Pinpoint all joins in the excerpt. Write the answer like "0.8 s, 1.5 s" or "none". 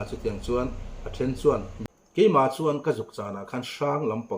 2.2 s